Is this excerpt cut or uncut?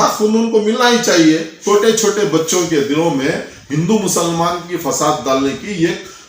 cut